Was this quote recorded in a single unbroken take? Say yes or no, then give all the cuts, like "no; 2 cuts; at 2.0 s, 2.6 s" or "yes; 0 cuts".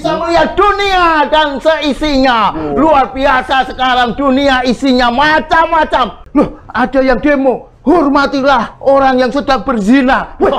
no; 1 cut; at 6.2 s